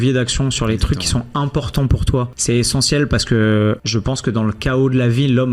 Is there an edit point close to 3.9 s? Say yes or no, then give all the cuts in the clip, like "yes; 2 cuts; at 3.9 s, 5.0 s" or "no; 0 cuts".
yes; 2 cuts; at 2.3 s, 3.9 s